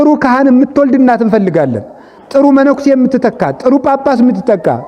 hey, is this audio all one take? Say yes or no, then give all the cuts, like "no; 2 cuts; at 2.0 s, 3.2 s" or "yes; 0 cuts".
yes; 0 cuts